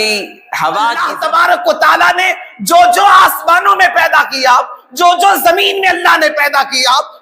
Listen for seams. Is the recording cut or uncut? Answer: cut